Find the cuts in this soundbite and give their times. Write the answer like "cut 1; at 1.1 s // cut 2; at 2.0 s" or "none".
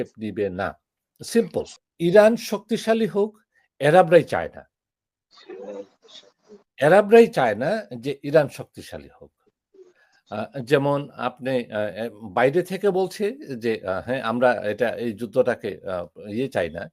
cut 1; at 1.8 s